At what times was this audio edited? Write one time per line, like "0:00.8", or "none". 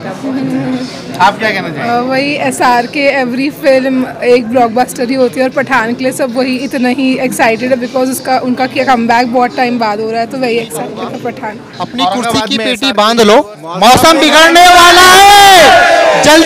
0:12.6